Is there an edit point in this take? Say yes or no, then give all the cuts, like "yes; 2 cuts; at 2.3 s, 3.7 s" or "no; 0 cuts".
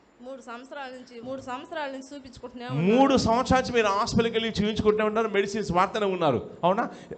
yes; 1 cut; at 1.2 s